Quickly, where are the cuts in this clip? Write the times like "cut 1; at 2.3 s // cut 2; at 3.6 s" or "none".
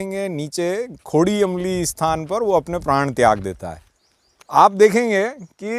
none